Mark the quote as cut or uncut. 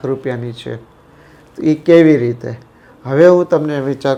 uncut